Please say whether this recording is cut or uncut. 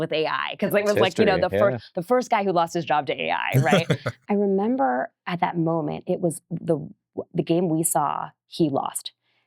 cut